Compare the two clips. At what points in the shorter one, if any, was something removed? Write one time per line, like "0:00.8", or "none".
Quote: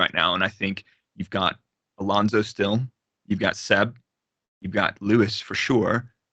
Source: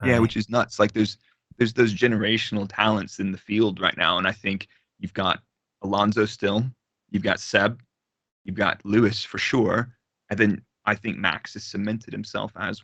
none